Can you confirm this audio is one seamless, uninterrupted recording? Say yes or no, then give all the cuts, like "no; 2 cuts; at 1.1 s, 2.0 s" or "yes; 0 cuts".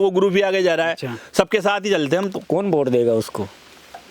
no; 1 cut; at 2.4 s